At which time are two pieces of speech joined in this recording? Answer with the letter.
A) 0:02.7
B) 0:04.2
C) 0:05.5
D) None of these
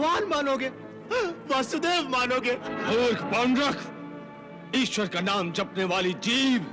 A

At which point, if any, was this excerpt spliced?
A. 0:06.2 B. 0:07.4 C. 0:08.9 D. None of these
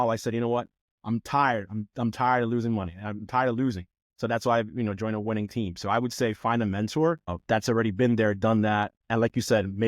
B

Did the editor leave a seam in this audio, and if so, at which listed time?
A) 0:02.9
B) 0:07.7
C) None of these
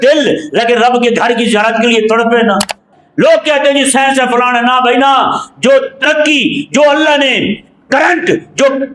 A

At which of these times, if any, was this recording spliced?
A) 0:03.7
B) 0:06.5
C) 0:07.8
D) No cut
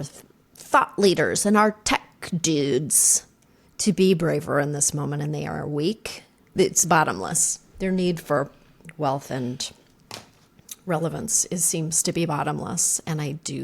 B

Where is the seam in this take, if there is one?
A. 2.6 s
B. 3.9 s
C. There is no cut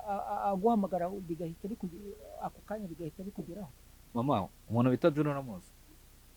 B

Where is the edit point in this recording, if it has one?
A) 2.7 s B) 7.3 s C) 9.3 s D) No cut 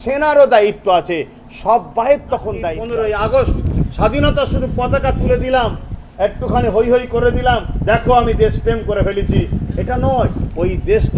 A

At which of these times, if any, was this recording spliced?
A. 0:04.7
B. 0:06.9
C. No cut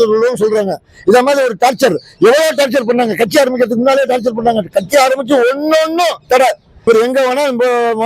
B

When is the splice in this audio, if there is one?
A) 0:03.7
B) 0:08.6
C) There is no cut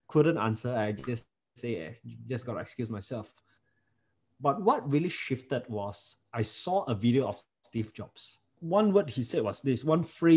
B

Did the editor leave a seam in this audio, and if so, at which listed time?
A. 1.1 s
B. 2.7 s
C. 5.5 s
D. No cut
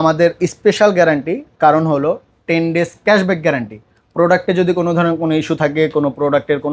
D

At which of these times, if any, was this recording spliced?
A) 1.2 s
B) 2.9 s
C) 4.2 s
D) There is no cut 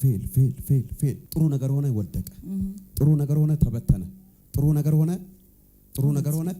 A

